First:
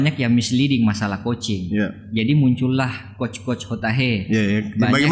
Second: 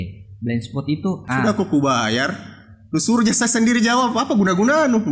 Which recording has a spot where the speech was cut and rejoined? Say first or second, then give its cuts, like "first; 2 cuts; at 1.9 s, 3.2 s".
second; 1 cut; at 1.2 s